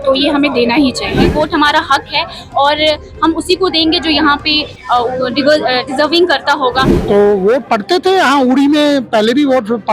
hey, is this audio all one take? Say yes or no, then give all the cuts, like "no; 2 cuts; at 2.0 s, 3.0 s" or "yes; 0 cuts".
no; 2 cuts; at 1.3 s, 6.9 s